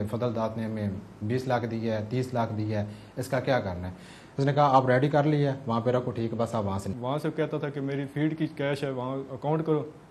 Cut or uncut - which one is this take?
cut